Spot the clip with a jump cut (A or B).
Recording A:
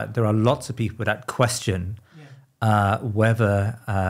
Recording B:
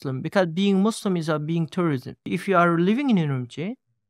B